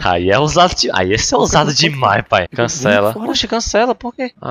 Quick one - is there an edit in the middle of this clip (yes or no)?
no